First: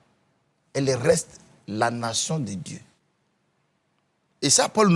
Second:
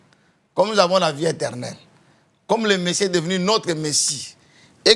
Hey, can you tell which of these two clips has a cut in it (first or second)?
first